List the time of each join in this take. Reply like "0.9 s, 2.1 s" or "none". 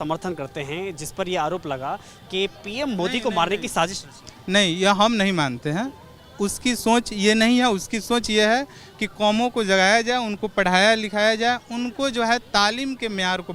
none